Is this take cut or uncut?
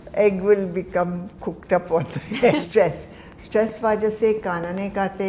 cut